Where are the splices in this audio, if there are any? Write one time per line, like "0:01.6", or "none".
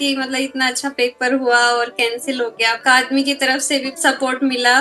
0:02.8
0:03.9